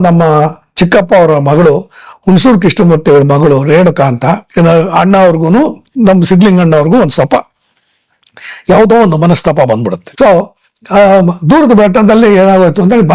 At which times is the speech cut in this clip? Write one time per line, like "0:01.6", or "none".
0:04.5

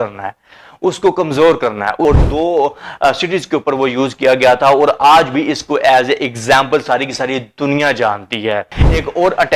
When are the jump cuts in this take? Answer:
0:02.1
0:08.6

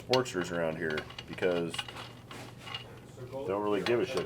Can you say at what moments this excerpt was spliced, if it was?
none

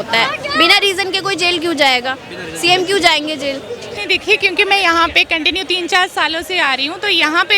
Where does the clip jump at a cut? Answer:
0:03.9

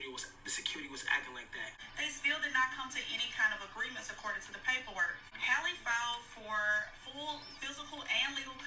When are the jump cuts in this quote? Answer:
0:01.8
0:05.3

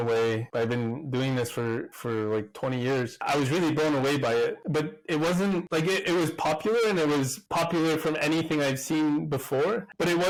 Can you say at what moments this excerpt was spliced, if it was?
none

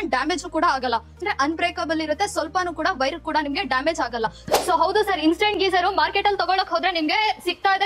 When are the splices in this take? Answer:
0:04.4

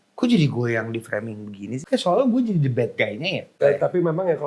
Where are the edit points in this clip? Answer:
0:01.7
0:03.5

